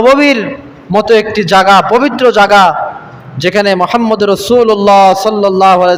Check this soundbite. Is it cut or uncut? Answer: uncut